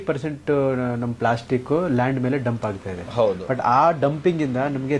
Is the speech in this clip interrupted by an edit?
no; 0 cuts

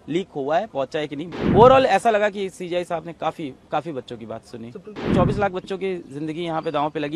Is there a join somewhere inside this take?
yes; 2 cuts; at 1.2 s, 5.0 s

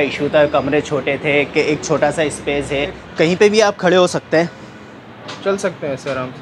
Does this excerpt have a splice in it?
yes; 1 cut; at 3.0 s

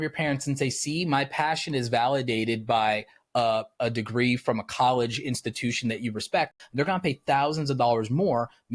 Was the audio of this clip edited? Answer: yes; 1 cut; at 6.6 s

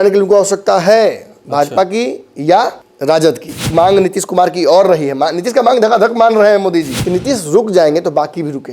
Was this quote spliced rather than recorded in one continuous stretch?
yes; 3 cuts; at 2.9 s, 3.7 s, 7.0 s

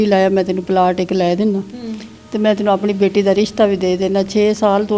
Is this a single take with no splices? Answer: yes; 0 cuts

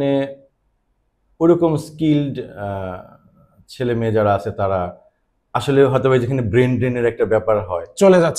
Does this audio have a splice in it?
no; 0 cuts

